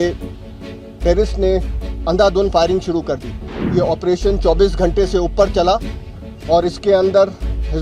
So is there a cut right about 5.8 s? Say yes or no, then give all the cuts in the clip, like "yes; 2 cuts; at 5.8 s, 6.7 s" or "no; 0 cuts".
no; 1 cut; at 3.6 s